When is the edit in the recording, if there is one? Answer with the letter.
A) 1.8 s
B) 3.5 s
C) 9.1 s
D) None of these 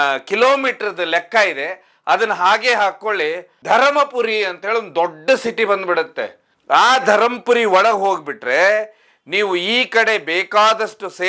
B